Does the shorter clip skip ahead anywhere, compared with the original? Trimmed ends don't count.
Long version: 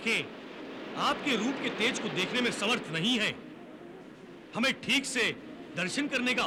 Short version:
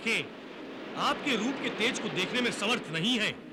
no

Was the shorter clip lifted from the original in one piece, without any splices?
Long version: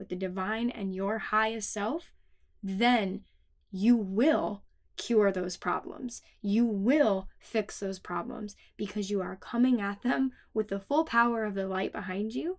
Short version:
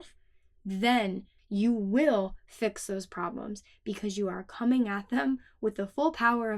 no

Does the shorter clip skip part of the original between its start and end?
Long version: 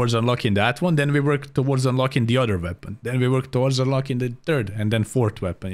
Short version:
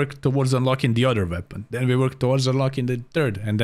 no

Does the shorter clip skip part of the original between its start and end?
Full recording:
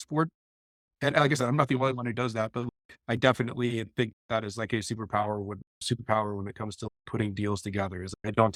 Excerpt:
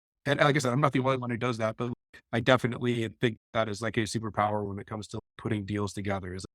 yes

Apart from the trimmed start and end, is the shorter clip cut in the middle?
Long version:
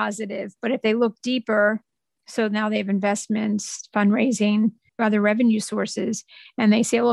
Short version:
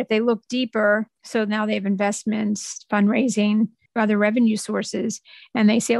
yes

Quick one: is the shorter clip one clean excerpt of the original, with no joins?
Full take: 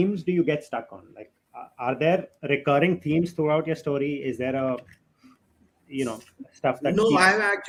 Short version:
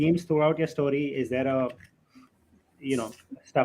yes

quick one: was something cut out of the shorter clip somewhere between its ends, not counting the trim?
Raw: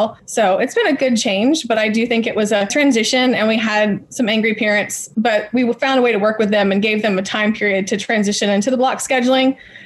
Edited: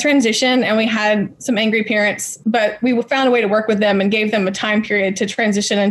no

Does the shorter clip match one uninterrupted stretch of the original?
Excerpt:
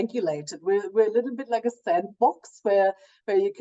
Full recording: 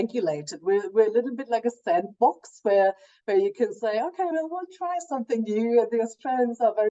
yes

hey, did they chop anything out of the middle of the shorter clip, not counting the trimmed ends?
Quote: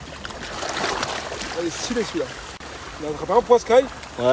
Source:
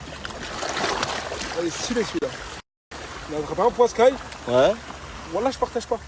yes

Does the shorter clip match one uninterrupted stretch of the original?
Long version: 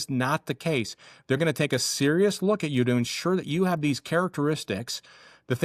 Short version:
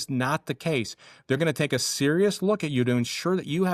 yes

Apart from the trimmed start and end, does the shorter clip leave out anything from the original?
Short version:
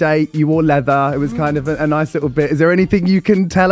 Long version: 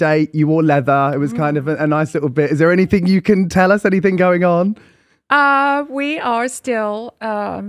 no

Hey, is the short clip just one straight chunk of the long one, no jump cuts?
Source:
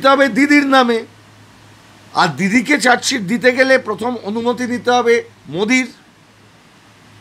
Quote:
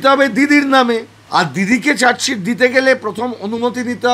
no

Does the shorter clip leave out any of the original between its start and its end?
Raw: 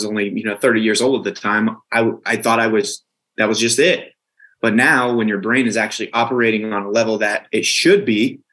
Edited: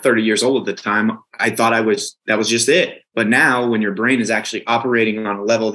yes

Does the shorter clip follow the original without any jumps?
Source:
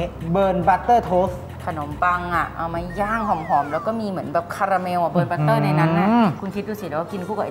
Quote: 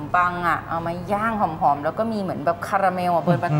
yes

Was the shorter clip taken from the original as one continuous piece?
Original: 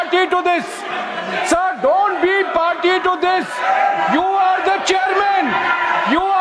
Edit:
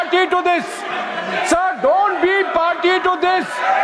yes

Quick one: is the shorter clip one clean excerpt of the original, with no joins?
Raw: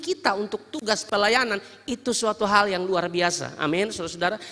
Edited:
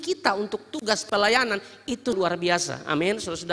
no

